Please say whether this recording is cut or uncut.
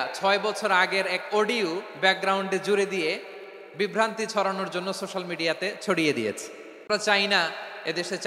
cut